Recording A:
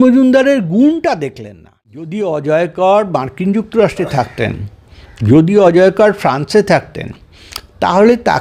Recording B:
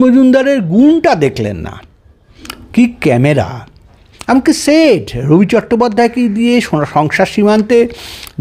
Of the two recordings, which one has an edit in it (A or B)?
A